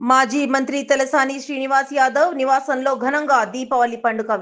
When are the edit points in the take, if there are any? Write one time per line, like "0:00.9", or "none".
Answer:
none